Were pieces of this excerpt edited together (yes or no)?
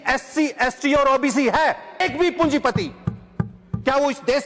yes